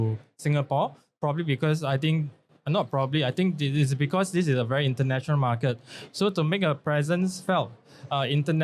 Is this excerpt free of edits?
yes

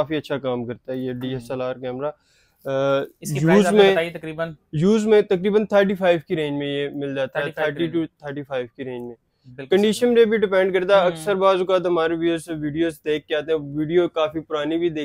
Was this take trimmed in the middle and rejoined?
no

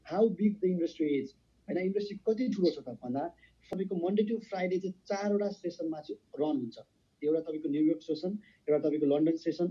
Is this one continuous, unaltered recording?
no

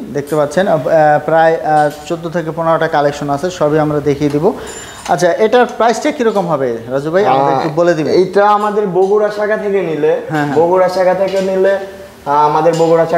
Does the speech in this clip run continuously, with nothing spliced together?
yes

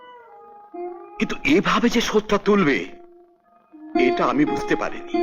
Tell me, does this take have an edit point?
no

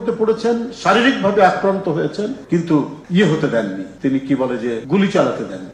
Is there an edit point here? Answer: no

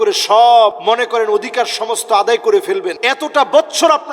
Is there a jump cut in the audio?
yes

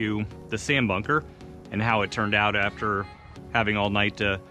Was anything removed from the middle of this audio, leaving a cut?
no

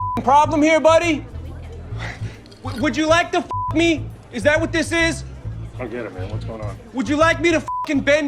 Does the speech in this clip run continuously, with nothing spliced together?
yes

